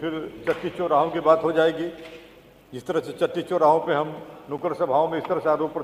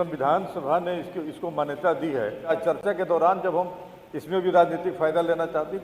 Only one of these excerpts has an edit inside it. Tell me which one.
second; 1 cut; at 2.5 s

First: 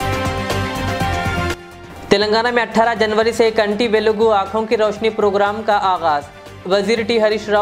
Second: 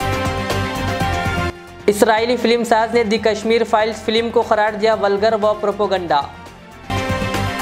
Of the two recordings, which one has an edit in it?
first; 1 cut; at 1.5 s

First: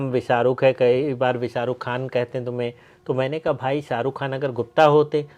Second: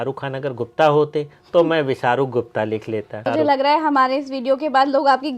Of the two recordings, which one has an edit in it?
second; 1 cut; at 3.2 s

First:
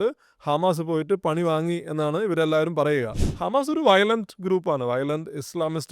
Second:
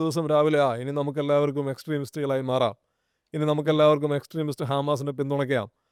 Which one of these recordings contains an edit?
first; 1 cut; at 3.2 s

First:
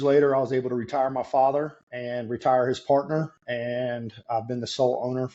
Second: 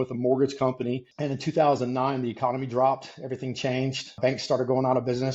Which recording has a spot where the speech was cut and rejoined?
second; 2 cuts; at 1.1 s, 4.2 s

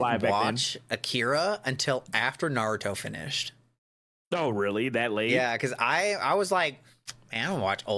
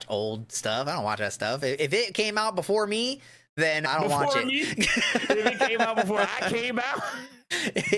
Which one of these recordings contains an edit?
second; 1 cut; at 3.8 s

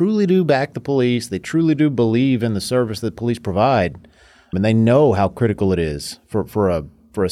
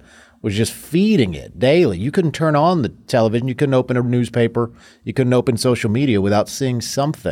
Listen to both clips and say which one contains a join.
first; 1 cut; at 4.5 s

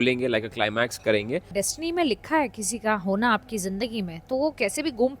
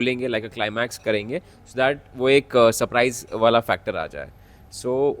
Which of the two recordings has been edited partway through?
first; 1 cut; at 1.5 s

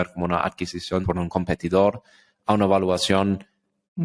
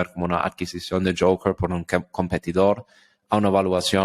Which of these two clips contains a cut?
first; 1 cut; at 1.1 s

